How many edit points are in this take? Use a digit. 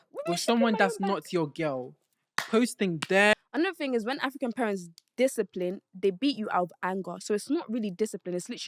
1